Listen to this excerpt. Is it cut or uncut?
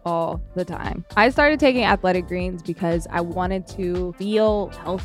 cut